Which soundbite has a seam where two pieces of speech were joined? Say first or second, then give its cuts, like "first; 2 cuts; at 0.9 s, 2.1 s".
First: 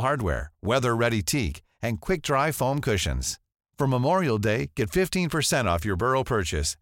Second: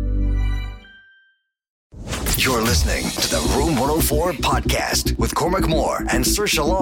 second; 1 cut; at 1.9 s